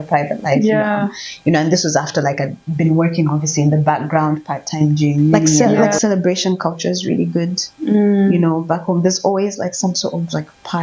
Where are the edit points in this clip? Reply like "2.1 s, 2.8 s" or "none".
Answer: 5.8 s